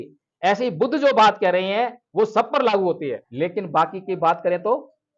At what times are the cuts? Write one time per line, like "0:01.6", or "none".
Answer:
0:03.2